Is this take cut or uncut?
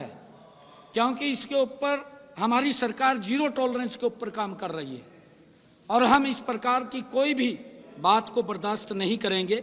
uncut